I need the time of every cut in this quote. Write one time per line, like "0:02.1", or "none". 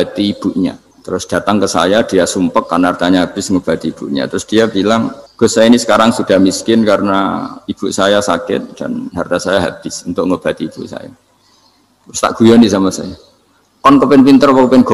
0:00.9
0:05.2